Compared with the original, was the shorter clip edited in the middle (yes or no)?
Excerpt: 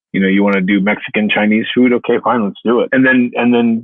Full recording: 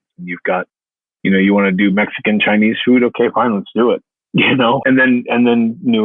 yes